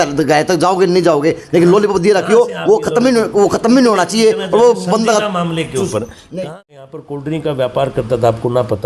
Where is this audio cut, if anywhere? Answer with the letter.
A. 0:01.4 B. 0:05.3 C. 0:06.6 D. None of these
C